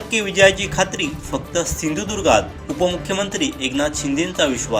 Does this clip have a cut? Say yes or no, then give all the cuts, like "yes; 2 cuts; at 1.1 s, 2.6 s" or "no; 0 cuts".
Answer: no; 0 cuts